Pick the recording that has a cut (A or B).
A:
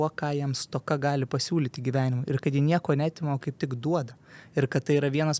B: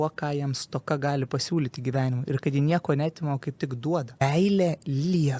B